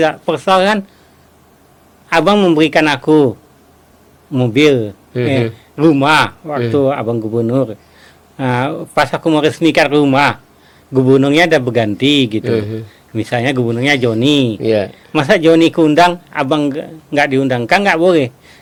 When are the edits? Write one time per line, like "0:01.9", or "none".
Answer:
none